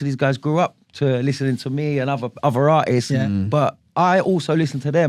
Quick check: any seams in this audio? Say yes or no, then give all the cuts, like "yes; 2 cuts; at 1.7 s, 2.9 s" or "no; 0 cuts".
no; 0 cuts